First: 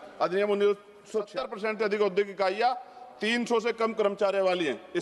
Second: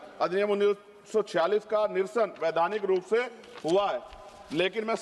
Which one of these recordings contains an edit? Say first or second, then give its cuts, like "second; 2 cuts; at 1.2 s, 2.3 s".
first; 1 cut; at 1.3 s